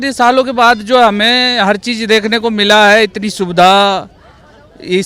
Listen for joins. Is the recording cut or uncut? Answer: uncut